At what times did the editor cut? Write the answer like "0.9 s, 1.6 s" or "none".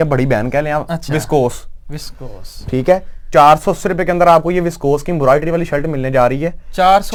none